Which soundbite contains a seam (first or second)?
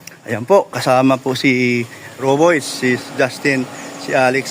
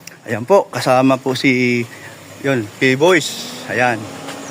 first